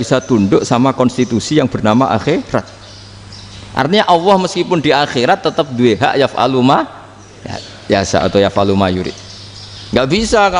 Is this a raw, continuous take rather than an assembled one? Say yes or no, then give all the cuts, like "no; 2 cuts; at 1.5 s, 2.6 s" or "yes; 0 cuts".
yes; 0 cuts